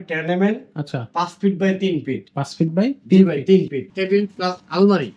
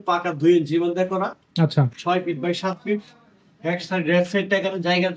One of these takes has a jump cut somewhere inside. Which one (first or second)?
first